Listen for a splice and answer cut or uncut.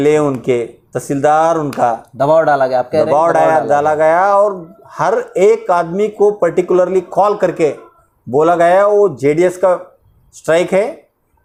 uncut